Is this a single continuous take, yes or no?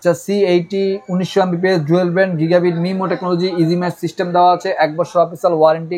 yes